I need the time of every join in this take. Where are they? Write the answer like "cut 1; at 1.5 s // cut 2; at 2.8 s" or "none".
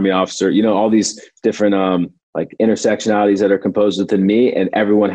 cut 1; at 2.2 s